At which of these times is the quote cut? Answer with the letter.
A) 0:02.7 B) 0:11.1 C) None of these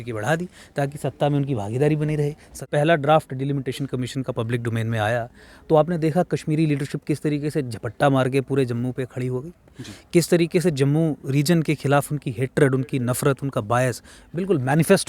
A